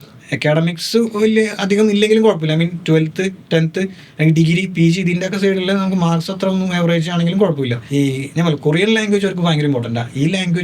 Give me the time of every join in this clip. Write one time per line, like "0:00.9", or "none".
0:07.8